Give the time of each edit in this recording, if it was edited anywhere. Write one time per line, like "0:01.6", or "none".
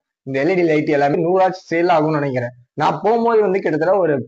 0:01.1